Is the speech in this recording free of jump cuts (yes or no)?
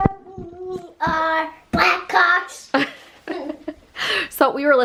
yes